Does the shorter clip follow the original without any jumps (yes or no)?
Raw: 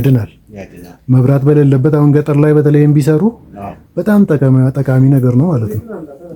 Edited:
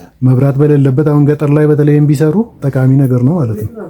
no